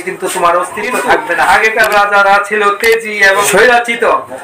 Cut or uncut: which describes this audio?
cut